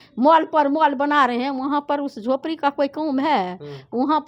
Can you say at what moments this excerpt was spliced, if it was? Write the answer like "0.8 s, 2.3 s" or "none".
none